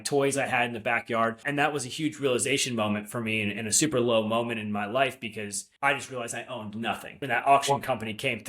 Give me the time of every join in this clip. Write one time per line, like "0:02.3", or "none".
0:01.4
0:05.6
0:07.2